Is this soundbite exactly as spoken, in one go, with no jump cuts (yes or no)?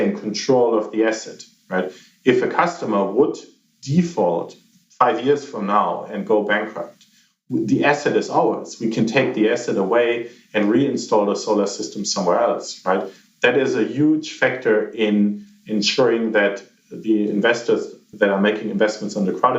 no